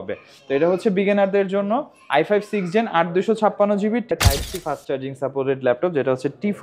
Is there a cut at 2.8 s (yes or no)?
no